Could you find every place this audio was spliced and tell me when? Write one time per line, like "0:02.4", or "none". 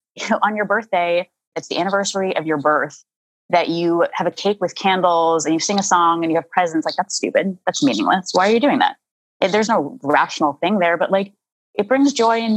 0:01.6
0:04.4
0:09.7